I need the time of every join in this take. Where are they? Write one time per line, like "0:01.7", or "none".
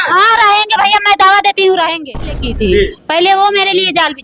0:02.3

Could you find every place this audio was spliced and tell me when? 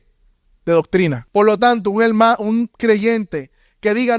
0:01.2

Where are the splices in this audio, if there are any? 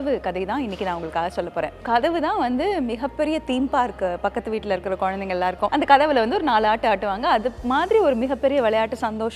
0:01.8
0:05.7

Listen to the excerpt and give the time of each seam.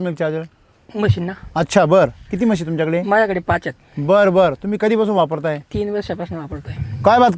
none

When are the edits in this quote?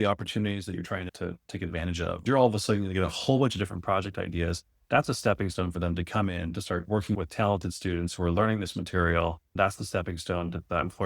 0:02.2
0:09.6

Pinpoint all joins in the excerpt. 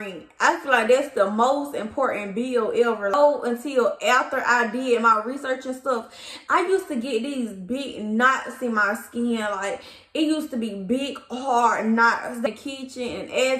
0:03.1
0:12.5

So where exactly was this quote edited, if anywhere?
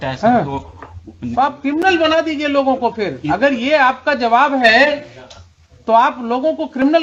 none

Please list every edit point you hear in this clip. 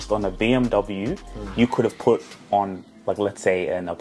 none

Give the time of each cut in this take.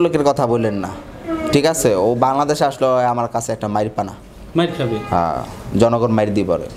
none

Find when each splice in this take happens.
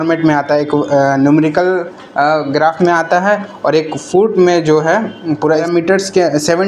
0:05.7

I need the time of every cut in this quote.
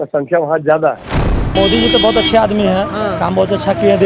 0:01.3

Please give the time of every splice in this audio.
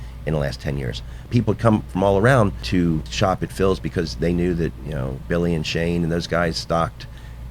0:01.2
0:02.9

